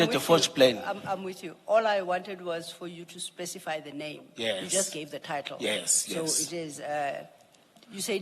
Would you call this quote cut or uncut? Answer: uncut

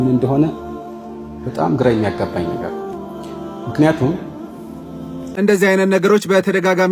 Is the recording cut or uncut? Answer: cut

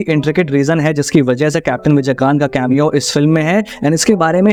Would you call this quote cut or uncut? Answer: uncut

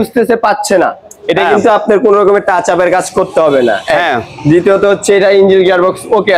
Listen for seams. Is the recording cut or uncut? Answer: uncut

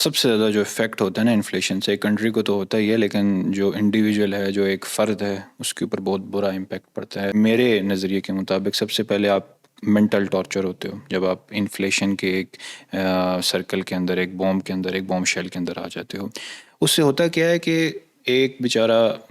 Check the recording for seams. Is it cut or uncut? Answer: cut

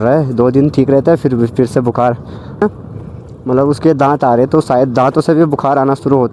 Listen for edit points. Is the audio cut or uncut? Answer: cut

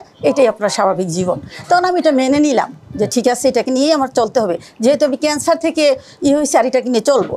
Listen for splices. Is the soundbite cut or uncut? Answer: uncut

